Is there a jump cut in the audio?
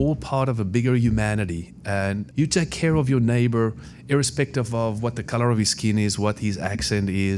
no; 0 cuts

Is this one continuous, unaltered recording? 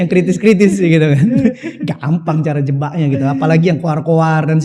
yes; 0 cuts

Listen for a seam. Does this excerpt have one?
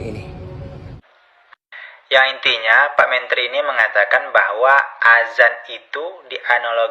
yes; 1 cut; at 1.0 s

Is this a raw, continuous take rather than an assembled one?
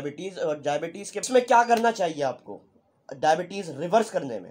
no; 1 cut; at 1.2 s

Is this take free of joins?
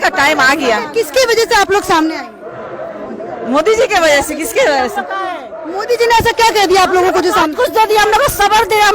yes; 0 cuts

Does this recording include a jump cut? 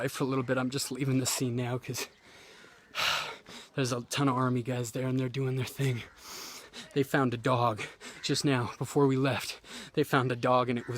yes; 1 cut; at 6.6 s

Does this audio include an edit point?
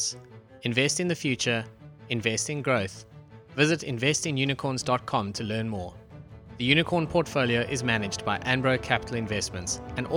no; 0 cuts

